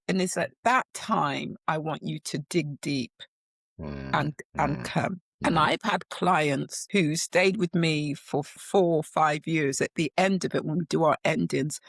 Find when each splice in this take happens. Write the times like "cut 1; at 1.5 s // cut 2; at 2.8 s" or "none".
cut 1; at 5.3 s // cut 2; at 6.7 s // cut 3; at 8.5 s